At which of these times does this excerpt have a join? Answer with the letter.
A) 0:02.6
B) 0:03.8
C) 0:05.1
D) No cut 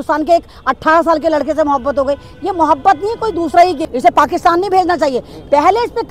B